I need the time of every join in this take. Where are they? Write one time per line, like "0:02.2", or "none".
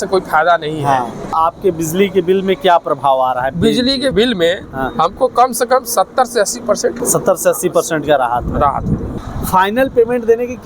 0:01.4
0:04.1
0:07.0
0:09.2